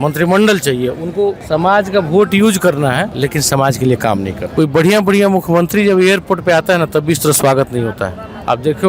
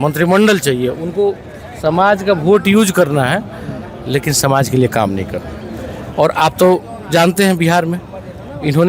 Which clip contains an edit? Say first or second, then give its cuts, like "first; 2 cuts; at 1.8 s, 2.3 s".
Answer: first; 3 cuts; at 1.4 s, 3.1 s, 4.4 s